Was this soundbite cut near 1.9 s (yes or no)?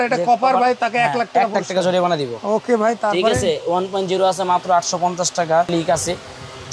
no